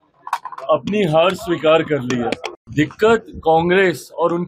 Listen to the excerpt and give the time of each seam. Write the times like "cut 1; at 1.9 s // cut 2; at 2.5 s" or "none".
cut 1; at 2.5 s